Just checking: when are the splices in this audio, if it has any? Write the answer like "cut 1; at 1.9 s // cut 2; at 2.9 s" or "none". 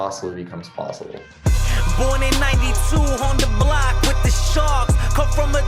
cut 1; at 1.2 s

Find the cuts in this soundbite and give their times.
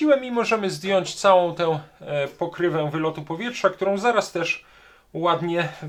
none

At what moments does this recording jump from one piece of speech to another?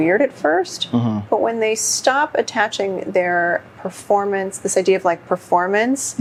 none

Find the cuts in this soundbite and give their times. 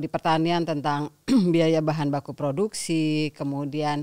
none

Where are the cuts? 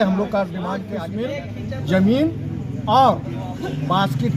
cut 1; at 0.9 s

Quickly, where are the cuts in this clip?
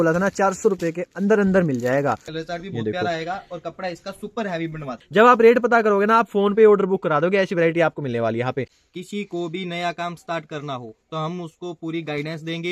cut 1; at 2.3 s // cut 2; at 4.9 s // cut 3; at 8.7 s

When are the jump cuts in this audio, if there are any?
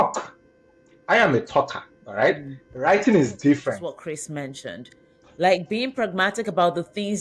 cut 1; at 4.0 s

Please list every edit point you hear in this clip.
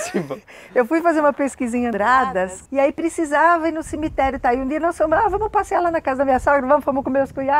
cut 1; at 2.6 s

